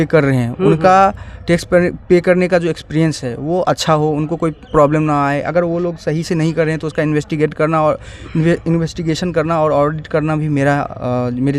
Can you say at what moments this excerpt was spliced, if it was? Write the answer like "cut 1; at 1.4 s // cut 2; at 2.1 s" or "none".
none